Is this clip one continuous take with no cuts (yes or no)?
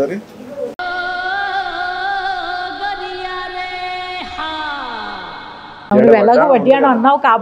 no